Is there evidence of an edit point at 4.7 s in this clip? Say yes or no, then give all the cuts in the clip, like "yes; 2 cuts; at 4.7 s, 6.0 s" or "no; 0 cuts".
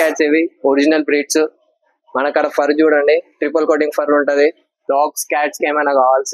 yes; 1 cut; at 4.7 s